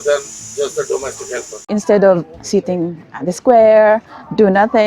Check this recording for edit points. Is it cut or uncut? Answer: cut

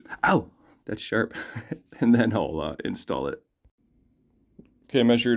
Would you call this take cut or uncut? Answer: uncut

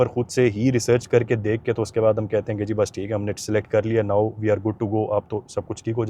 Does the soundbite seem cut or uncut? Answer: uncut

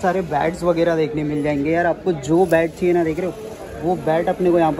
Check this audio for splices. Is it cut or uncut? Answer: uncut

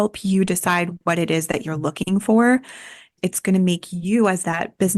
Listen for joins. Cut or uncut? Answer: cut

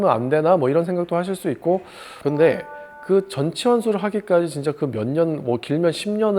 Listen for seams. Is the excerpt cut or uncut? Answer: cut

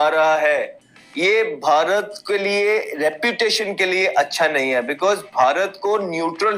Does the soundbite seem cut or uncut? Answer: uncut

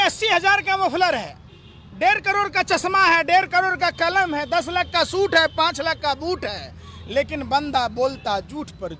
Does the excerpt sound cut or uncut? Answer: uncut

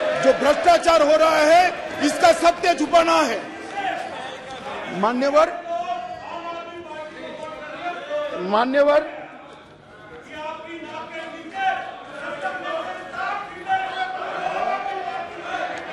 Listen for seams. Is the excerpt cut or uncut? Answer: uncut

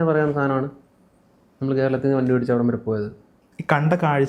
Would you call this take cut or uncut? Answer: uncut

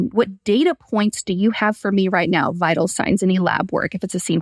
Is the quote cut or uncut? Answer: uncut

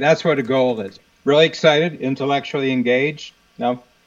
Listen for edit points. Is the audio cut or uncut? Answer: cut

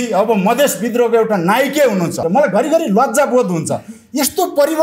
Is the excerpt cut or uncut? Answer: cut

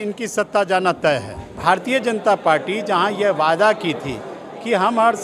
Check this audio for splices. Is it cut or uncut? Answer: cut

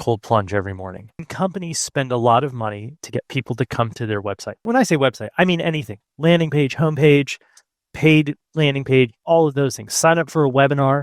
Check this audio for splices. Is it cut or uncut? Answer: cut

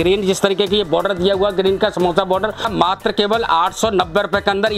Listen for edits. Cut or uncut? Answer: cut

